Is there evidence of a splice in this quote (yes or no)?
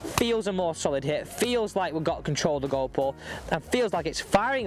no